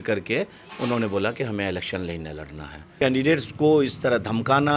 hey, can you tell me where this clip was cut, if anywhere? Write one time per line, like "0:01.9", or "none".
0:03.0